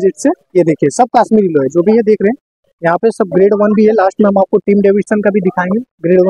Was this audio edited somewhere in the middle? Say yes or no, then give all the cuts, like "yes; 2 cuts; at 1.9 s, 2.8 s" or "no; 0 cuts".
no; 0 cuts